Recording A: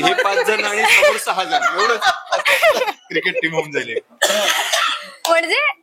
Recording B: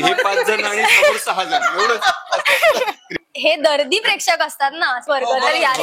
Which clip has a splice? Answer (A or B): B